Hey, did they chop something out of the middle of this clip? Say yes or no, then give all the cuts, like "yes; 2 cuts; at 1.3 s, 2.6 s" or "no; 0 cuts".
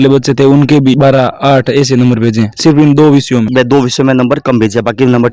no; 0 cuts